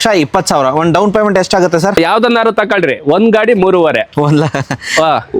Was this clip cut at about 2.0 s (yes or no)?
yes